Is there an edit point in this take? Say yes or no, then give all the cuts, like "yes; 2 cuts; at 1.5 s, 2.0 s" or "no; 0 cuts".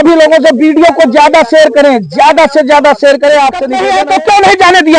yes; 1 cut; at 3.8 s